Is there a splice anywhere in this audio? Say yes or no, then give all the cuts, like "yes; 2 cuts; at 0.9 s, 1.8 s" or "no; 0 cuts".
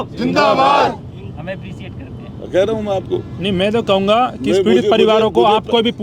no; 0 cuts